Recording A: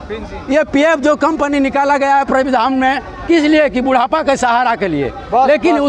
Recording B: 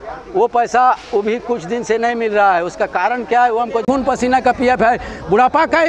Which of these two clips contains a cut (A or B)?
B